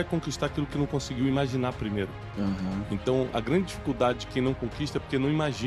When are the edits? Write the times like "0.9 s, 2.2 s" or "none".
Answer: none